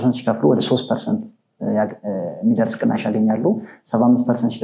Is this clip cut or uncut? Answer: uncut